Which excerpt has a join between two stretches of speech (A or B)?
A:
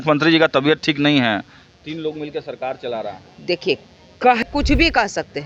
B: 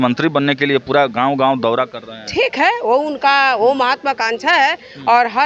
A